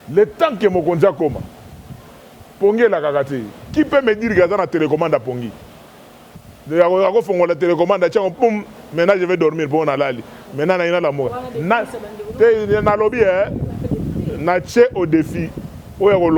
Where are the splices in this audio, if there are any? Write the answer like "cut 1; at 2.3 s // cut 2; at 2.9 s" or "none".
none